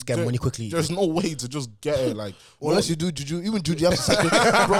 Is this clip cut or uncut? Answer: uncut